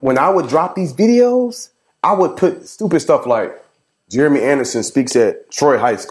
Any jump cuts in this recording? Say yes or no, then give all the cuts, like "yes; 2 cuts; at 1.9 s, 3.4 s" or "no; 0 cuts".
no; 0 cuts